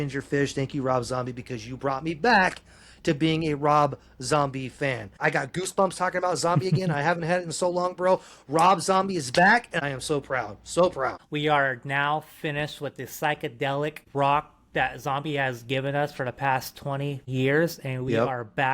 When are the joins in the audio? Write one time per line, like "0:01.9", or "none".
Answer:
0:05.2
0:09.8
0:11.2
0:14.0
0:17.2